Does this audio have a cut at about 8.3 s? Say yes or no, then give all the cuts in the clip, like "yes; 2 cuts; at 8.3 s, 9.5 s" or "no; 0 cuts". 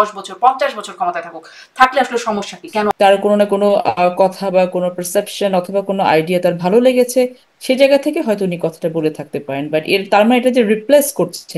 no; 1 cut; at 2.9 s